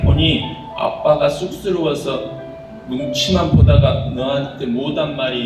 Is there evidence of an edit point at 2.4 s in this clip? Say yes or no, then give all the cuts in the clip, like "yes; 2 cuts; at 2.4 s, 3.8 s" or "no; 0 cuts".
no; 0 cuts